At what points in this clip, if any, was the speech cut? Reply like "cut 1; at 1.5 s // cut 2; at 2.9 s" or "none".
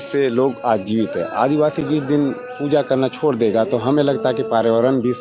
none